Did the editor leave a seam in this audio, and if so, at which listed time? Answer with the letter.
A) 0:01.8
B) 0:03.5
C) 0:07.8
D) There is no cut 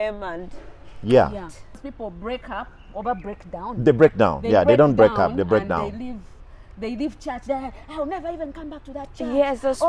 A